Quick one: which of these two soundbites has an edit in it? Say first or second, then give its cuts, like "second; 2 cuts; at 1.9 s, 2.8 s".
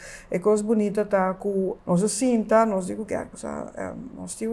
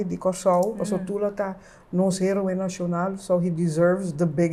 first; 1 cut; at 1.7 s